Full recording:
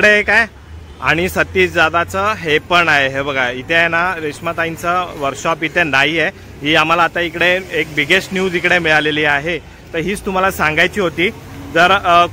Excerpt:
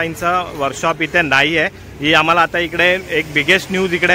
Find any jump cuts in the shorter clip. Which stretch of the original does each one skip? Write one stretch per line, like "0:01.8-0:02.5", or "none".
none